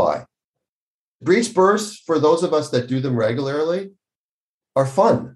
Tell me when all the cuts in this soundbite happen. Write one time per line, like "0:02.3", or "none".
0:01.1

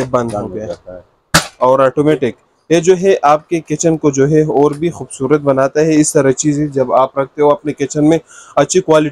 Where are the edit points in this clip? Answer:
none

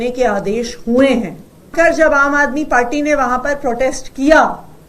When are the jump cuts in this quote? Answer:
0:01.7

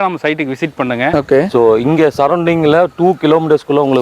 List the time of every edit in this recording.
0:01.1

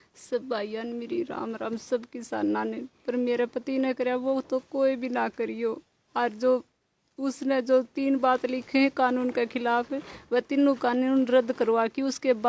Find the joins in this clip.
none

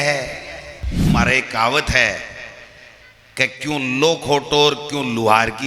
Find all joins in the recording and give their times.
0:01.1

